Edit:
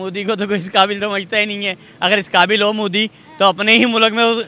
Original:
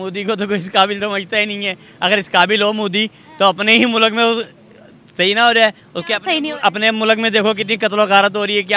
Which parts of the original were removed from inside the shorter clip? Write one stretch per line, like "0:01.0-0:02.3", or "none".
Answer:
none